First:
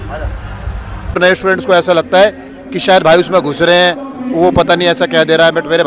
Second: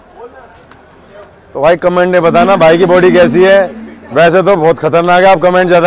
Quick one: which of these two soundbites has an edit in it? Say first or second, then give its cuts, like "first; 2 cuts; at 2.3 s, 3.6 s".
first; 1 cut; at 1.2 s